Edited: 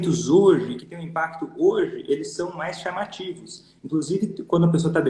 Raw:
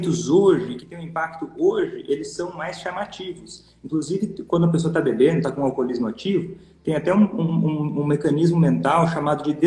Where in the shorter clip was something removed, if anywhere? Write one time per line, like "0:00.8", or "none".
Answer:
none